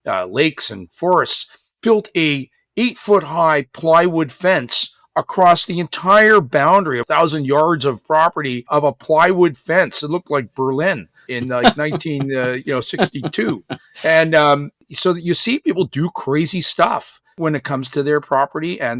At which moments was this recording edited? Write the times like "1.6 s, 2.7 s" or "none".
7.0 s, 8.7 s, 11.3 s, 14.7 s, 17.4 s